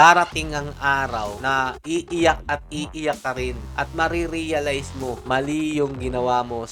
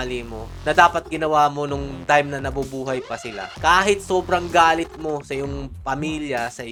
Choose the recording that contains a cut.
first; 3 cuts; at 1.5 s, 3.6 s, 5.2 s

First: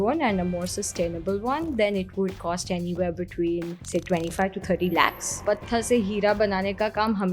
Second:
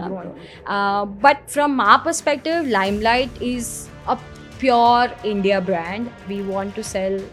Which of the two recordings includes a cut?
first; 2 cuts; at 3.8 s, 5.4 s

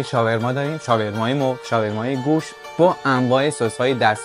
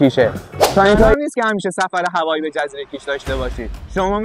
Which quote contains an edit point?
second; 1 cut; at 1.1 s

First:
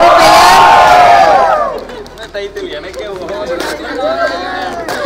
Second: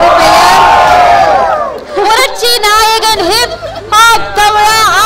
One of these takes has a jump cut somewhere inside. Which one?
second; 1 cut; at 1.8 s

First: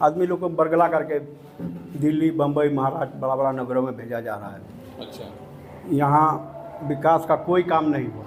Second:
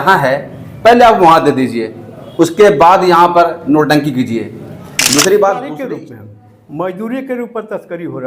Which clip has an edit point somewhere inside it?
second; 1 cut; at 5.7 s

